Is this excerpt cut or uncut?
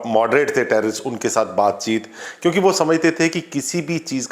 uncut